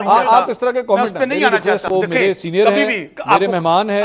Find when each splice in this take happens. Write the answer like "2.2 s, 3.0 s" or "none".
1.9 s

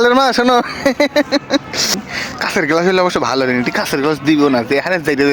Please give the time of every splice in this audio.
1.9 s

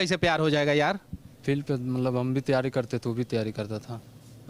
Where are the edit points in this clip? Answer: none

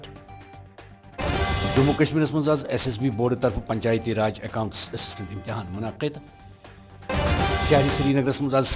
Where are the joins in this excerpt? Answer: 1.2 s

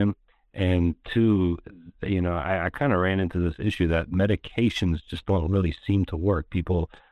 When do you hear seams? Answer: none

